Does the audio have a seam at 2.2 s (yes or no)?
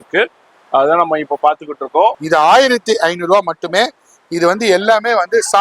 yes